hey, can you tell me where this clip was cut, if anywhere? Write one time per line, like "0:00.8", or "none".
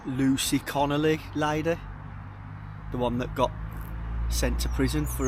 none